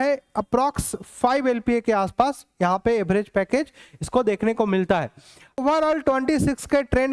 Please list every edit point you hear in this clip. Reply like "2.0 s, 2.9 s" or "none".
5.6 s

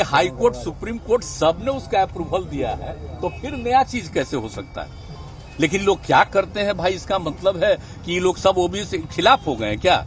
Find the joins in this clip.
none

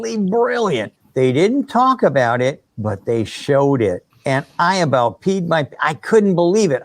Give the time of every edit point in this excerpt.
1.0 s, 4.1 s

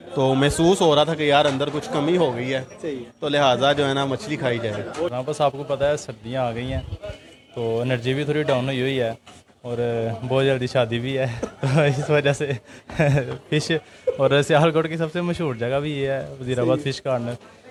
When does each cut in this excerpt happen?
none

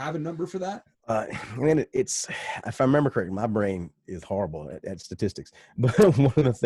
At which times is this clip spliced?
0.9 s

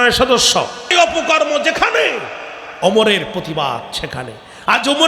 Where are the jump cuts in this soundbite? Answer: 0.9 s

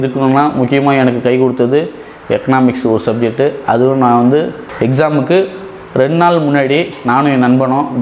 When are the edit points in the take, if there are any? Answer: none

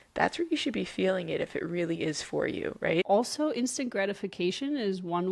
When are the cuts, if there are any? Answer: 3.1 s

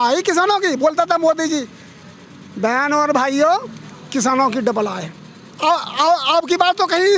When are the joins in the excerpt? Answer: none

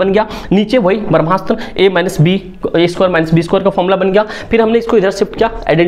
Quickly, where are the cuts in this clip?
none

